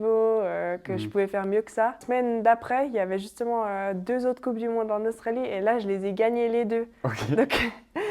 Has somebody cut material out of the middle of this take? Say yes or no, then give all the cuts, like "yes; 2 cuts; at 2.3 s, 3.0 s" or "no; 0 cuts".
yes; 1 cut; at 2.0 s